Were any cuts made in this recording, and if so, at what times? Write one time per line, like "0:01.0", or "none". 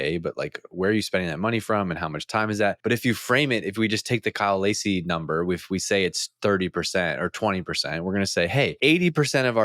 0:02.8